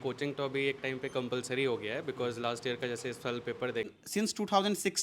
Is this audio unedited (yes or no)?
no